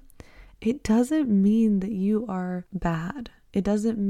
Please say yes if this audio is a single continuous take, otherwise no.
no